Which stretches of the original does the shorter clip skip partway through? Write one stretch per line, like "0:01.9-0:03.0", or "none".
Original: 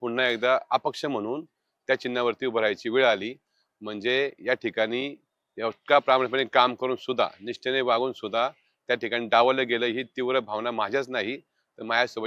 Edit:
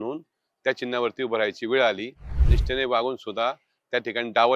0:03.7-0:07.4

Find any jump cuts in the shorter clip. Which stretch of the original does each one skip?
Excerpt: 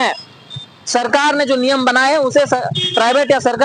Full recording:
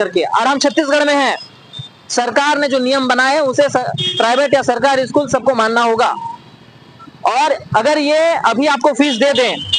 none

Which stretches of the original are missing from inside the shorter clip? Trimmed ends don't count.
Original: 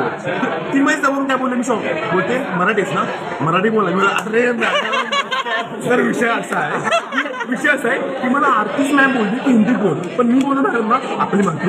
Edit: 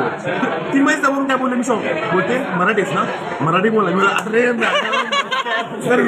none

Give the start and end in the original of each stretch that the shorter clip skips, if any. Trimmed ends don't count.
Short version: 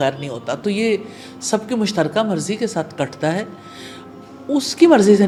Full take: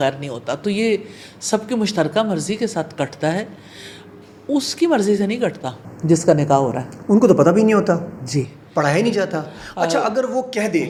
none

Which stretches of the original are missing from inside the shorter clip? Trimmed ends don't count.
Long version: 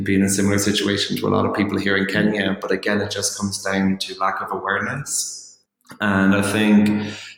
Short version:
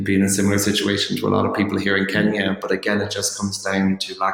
none

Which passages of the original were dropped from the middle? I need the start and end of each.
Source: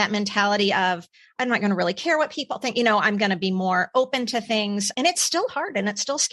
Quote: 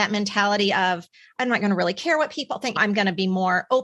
0:02.8-0:03.0

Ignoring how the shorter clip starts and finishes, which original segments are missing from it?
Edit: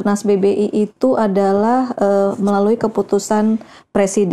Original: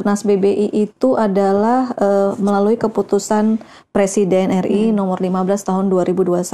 none

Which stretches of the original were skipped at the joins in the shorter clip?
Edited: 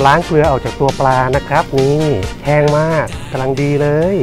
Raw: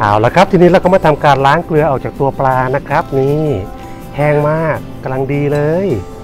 0:03.7-0:04.0

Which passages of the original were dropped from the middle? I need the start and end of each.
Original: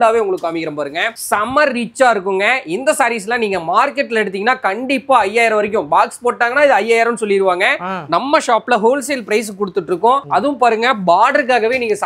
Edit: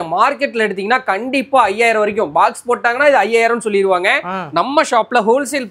none

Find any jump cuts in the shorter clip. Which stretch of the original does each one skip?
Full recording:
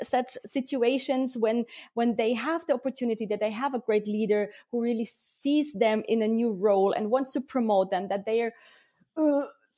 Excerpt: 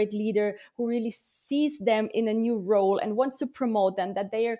none

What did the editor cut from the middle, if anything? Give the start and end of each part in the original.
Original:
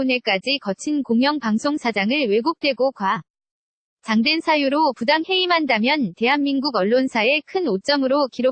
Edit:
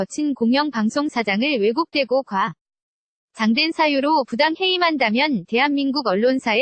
none

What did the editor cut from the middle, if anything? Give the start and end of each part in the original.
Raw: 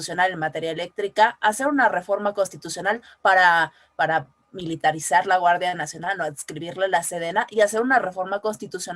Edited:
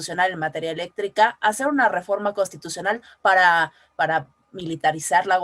none

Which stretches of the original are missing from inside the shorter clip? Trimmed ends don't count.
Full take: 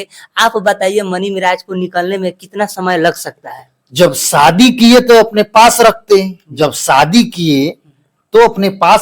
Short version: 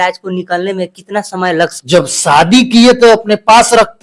0:03.2-0:03.9

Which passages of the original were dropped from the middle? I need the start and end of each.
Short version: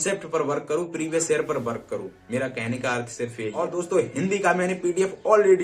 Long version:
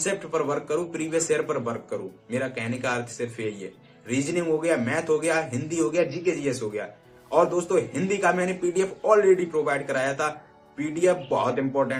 0:03.6-0:07.4

